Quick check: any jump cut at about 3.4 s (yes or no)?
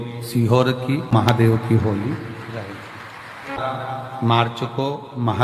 no